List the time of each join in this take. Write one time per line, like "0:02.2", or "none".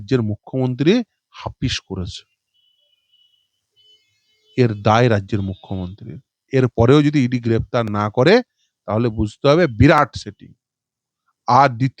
none

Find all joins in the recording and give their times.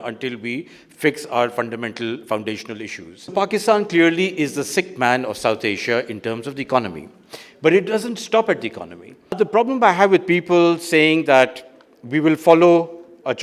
0:03.3
0:09.4

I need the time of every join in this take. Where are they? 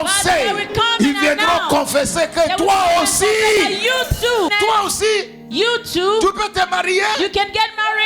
0:04.5

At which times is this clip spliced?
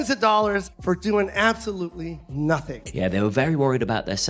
0:02.6

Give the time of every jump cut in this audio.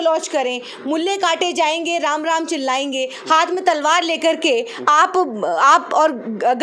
none

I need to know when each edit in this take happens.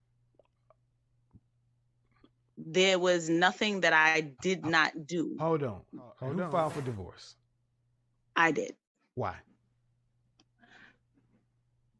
0:06.2

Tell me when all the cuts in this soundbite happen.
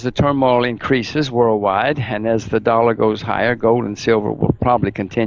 none

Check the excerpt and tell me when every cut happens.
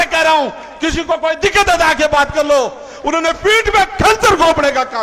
none

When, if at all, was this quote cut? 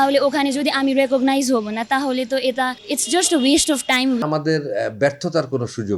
0:02.8
0:04.2

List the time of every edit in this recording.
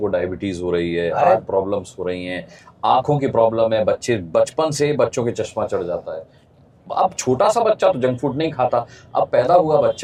none

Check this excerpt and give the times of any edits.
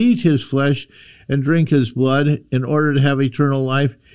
none

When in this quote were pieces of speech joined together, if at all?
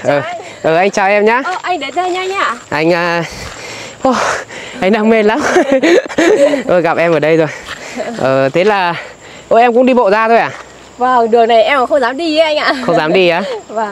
none

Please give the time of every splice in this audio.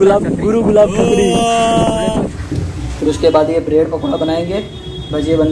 0:02.4

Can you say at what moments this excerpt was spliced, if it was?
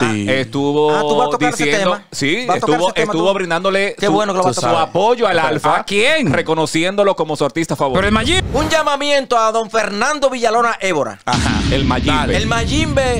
0:08.4

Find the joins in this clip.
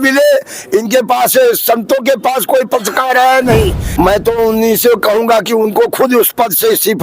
0:03.8

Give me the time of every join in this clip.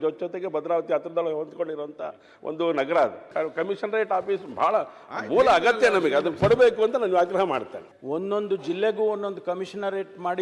0:03.3
0:07.8

